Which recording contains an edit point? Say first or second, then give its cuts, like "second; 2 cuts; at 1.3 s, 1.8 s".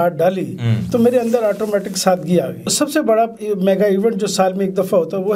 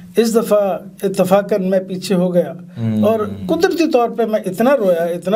first; 1 cut; at 2.7 s